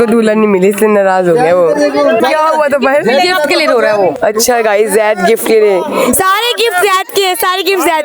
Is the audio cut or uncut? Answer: uncut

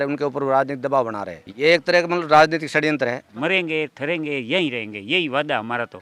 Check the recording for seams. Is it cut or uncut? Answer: cut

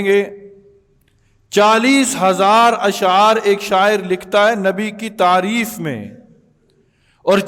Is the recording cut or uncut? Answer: uncut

